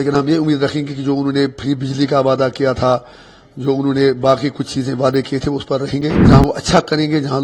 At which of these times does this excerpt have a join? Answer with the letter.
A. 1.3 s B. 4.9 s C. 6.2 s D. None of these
C